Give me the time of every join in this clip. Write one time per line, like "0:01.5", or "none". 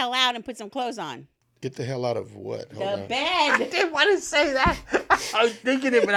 none